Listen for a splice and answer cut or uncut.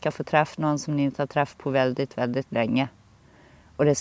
uncut